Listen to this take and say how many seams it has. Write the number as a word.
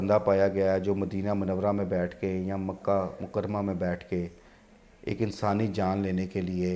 zero